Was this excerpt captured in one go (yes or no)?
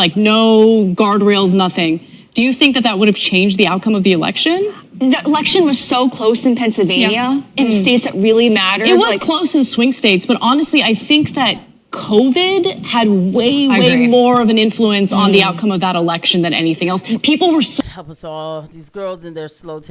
no